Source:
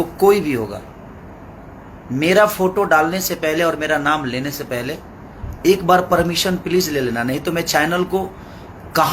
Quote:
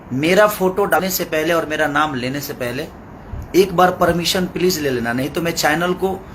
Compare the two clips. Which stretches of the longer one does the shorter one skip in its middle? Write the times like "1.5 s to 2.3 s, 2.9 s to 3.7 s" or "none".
2.9 s to 3.1 s